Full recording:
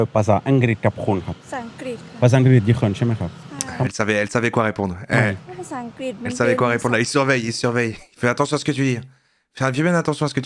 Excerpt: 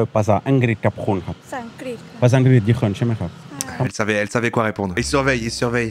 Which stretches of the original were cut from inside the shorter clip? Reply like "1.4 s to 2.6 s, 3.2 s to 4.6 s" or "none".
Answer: 5.0 s to 7.0 s

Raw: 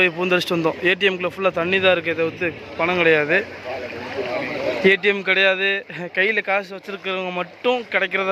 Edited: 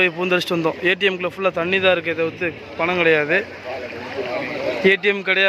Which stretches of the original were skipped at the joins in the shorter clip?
none

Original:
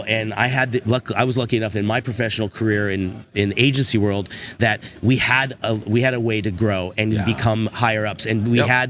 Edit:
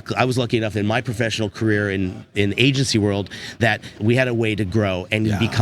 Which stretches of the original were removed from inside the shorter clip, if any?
5.0 s to 5.8 s

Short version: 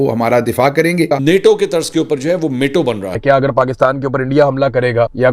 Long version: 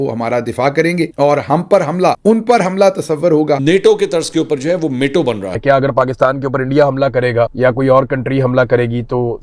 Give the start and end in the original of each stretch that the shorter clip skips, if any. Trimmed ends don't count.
1.1 s to 3.5 s

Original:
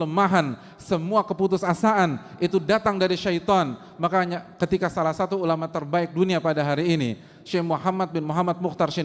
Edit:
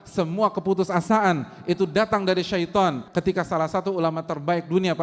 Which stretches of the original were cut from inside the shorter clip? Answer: 3.8 s to 4.5 s

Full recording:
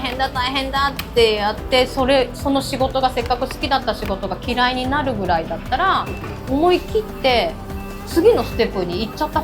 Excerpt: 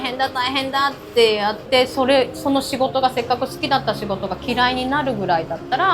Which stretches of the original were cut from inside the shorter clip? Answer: none

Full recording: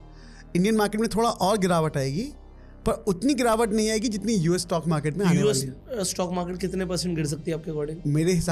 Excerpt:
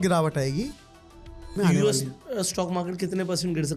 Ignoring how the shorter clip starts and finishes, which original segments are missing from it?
2.9 s to 4.9 s

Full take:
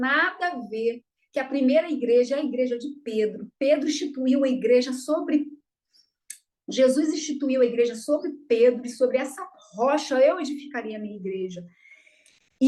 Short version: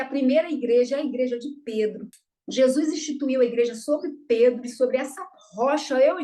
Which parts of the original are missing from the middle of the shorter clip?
3.4 s to 6.3 s

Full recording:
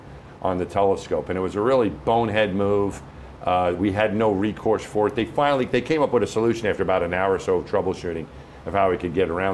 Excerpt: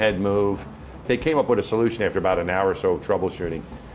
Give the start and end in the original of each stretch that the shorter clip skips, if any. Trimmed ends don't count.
3.4 s to 5.7 s

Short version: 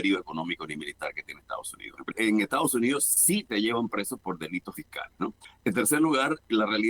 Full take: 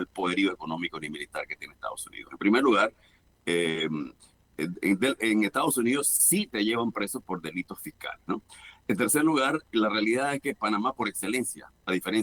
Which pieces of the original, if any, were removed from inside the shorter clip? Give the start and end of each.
2.4 s to 5.1 s, 8.2 s to 8.4 s

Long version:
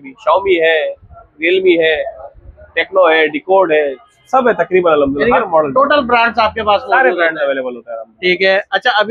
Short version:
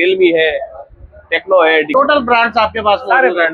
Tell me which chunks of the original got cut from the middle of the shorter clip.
3.3 s to 5.7 s

